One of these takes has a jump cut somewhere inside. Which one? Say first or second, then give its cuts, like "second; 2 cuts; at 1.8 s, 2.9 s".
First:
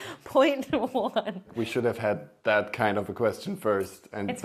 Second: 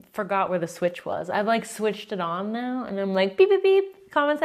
first; 1 cut; at 1.5 s